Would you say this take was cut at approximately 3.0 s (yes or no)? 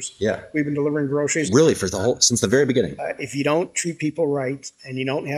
yes